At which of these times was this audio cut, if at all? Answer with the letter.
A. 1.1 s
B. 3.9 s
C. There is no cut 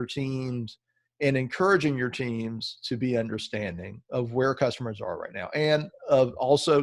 C